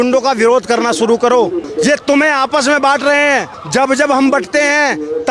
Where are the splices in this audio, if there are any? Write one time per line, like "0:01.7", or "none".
0:01.6
0:03.6